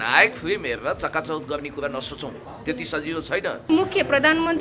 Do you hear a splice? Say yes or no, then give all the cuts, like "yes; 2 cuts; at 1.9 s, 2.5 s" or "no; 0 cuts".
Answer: yes; 1 cut; at 3.7 s